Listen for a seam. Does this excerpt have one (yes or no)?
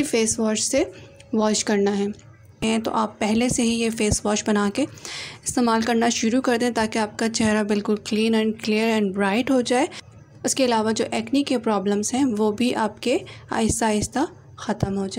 yes